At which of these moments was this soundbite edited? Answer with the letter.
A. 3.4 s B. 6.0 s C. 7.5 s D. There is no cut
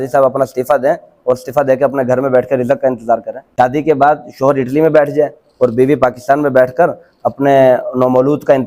A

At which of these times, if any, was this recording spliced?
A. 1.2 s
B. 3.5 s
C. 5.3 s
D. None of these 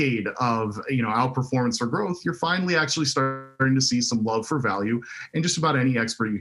D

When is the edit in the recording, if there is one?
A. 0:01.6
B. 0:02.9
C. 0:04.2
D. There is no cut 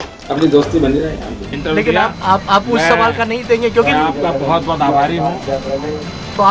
A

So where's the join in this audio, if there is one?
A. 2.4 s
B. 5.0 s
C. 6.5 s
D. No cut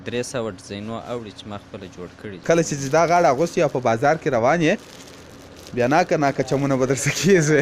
A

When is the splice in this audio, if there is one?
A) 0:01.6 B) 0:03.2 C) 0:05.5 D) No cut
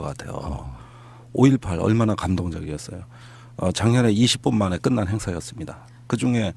C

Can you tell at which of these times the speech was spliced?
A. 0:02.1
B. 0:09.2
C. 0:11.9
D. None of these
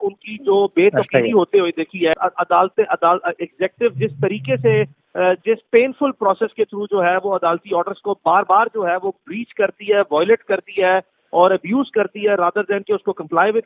A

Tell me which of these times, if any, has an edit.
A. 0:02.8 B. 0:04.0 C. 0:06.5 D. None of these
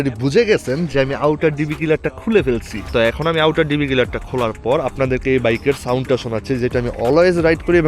A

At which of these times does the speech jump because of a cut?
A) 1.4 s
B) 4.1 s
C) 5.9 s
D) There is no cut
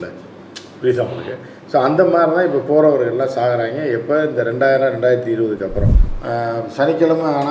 C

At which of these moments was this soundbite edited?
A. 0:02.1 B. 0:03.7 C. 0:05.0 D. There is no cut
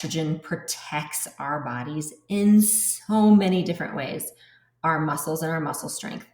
D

